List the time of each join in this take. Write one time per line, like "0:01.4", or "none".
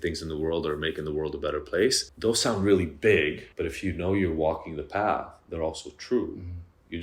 0:02.1
0:03.5